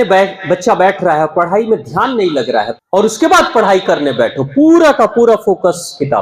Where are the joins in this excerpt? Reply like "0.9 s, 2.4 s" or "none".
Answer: 2.7 s